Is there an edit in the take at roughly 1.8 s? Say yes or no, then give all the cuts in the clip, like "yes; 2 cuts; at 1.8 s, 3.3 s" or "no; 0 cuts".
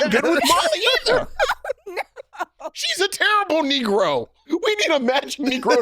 no; 1 cut; at 4.4 s